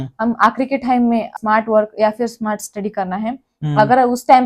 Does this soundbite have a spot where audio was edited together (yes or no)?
yes